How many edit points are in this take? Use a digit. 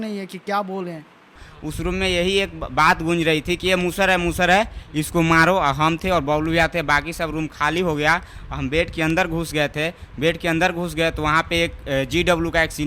1